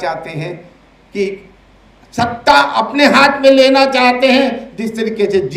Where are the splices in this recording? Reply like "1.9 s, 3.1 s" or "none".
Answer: none